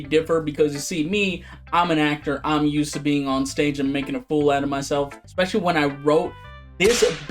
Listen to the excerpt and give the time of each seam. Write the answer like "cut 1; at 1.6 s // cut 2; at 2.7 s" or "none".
cut 1; at 5.2 s

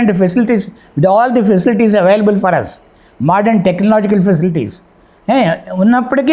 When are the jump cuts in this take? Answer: none

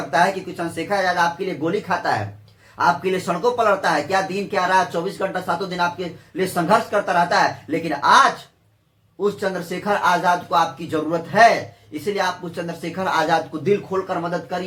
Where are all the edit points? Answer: none

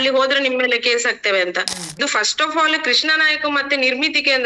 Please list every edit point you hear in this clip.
cut 1; at 2.0 s

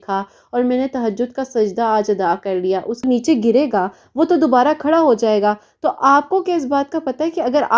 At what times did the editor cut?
cut 1; at 3.0 s

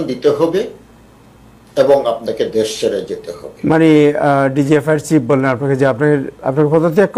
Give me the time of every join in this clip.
none

